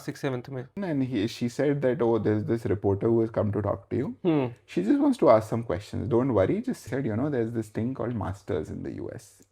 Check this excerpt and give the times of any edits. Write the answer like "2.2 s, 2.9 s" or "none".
0.7 s, 6.8 s